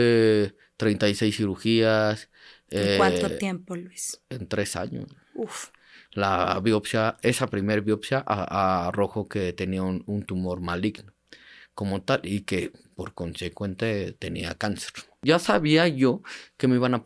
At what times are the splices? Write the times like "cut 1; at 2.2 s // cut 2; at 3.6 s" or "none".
cut 1; at 5.9 s // cut 2; at 15.2 s